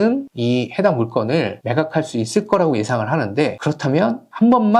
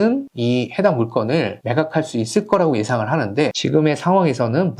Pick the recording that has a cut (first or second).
second